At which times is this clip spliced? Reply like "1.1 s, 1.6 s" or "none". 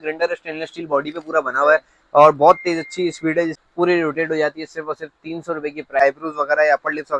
3.6 s, 6.0 s